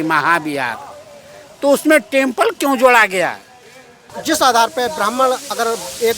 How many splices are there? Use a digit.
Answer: 1